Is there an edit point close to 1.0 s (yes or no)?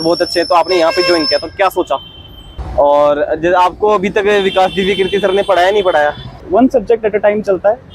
no